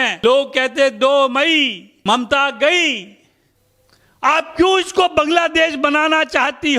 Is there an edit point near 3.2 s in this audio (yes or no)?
yes